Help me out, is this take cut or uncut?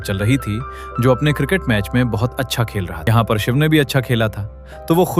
cut